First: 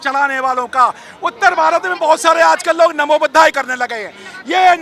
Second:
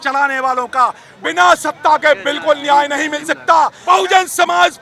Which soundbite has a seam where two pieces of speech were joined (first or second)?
second